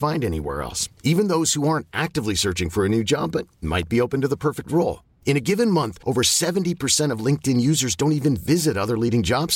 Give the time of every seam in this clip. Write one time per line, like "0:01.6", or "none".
none